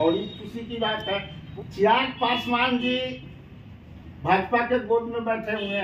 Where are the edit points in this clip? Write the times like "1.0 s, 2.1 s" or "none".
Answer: 1.4 s